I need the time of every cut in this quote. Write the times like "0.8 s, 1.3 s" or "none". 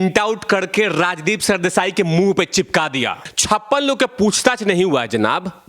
3.3 s